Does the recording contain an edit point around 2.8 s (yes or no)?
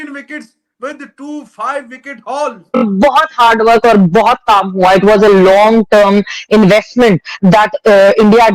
yes